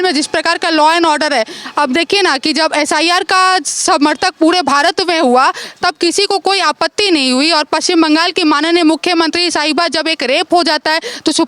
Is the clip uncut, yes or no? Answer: yes